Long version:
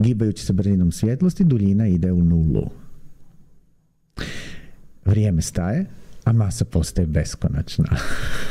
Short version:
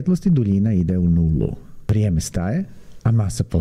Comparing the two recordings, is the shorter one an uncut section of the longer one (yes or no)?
no